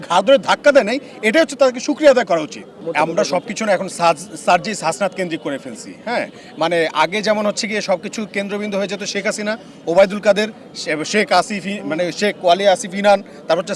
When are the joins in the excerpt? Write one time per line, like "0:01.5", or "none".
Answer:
none